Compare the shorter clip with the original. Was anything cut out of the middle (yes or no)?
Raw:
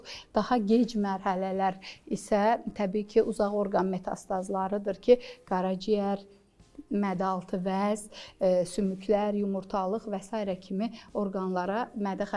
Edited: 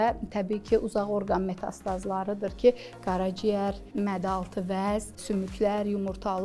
yes